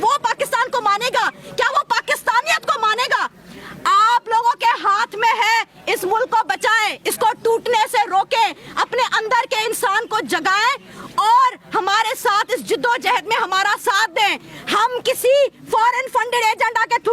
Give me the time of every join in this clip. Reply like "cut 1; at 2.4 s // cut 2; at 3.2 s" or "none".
none